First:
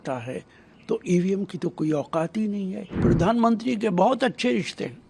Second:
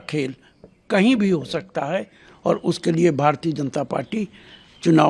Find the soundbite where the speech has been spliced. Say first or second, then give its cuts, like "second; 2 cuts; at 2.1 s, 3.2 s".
first; 1 cut; at 3.0 s